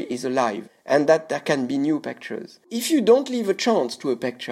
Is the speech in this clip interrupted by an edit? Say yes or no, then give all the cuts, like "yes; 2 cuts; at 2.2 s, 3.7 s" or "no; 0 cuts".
yes; 1 cut; at 2.7 s